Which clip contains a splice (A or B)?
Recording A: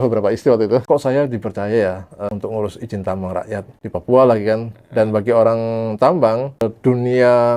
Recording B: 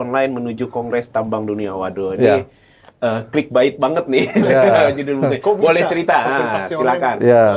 A